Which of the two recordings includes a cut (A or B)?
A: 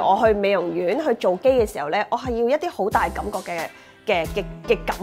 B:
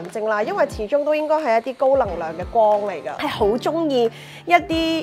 B